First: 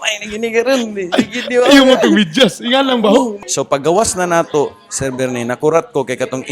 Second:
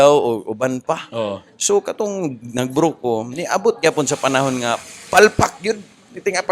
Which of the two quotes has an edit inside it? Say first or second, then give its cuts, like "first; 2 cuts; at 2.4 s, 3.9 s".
first; 1 cut; at 3.3 s